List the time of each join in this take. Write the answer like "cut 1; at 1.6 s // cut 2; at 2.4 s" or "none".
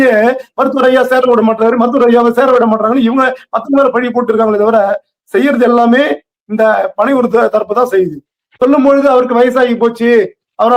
cut 1; at 8.4 s